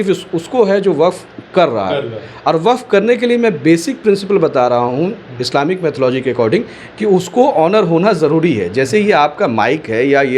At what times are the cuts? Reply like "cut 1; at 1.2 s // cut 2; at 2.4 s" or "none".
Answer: none